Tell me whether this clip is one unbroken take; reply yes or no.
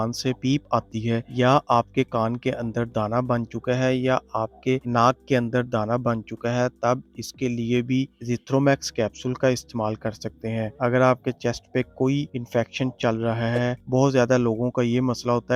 yes